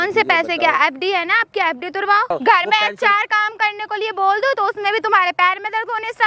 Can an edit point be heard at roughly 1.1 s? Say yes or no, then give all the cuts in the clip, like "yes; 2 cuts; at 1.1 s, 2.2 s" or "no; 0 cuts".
no; 1 cut; at 2.3 s